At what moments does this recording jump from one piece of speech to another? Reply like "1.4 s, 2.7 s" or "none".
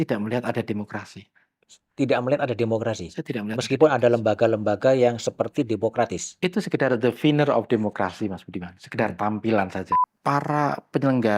10.0 s